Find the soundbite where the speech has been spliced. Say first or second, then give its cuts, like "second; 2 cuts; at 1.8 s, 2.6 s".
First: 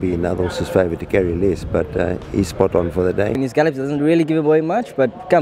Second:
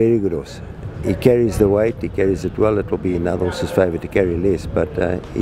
first; 1 cut; at 3.4 s